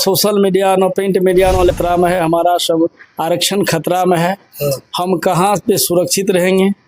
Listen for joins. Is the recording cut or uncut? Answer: cut